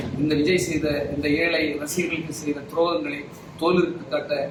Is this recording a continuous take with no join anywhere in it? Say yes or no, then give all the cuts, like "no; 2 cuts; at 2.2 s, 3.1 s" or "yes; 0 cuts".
yes; 0 cuts